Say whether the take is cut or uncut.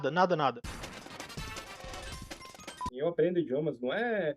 cut